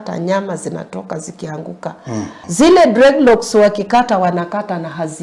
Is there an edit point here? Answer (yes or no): yes